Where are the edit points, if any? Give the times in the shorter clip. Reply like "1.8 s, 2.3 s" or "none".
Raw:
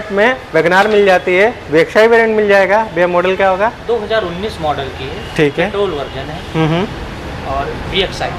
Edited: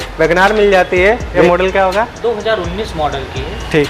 1.3 s